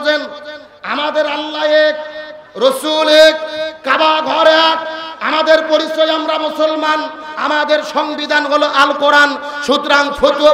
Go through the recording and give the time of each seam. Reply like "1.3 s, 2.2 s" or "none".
none

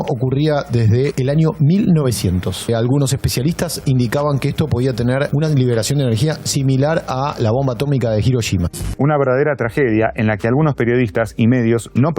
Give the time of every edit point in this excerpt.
none

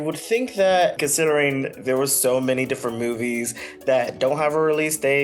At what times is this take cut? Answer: 1.0 s

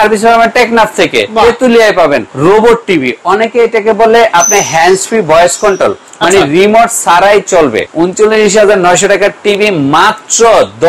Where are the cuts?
2.3 s, 7.9 s

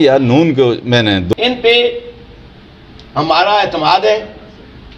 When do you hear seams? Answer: 1.3 s

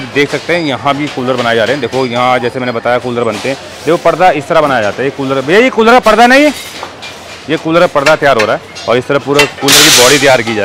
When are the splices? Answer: none

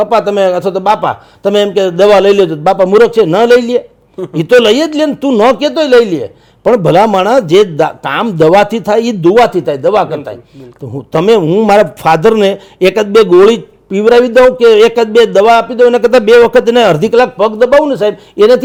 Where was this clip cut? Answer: none

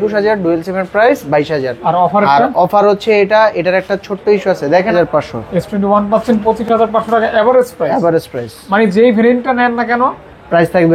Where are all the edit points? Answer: 4.9 s

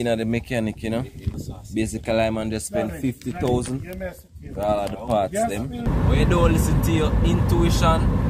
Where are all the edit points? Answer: 1.3 s, 5.9 s

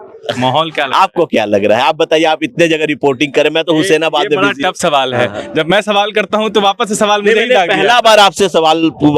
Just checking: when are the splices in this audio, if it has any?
none

